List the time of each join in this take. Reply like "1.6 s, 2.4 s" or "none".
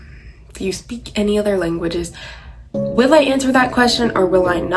none

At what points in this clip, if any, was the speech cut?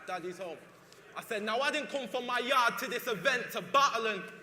3.1 s

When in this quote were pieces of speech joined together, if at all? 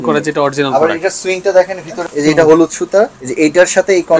2.1 s, 3.2 s

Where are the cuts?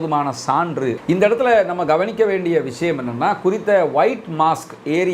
1.0 s

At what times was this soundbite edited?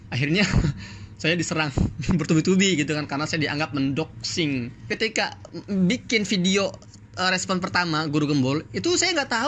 5.0 s

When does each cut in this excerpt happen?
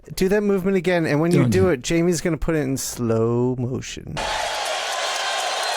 4.2 s

